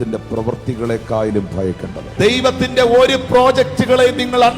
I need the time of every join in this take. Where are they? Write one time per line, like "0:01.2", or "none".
0:02.0

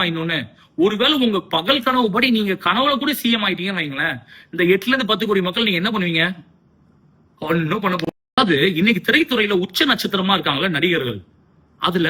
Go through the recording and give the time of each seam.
0:08.2

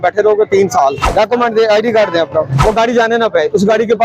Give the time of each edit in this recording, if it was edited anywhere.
0:01.1
0:02.5

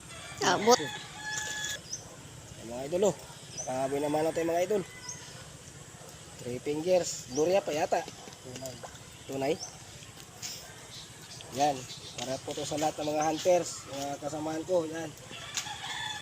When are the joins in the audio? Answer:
0:01.8

